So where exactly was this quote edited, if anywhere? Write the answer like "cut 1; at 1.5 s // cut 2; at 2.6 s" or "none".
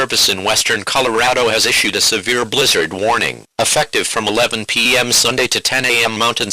none